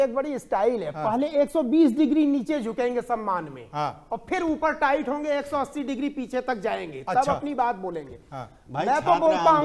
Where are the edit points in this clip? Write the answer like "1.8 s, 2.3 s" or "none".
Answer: none